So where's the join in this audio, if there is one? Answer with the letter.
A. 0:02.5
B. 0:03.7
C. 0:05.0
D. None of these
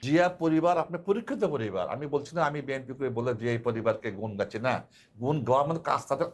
D